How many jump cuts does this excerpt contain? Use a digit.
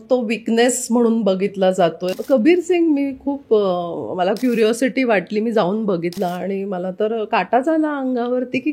2